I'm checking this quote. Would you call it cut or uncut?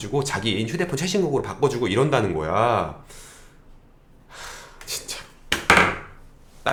uncut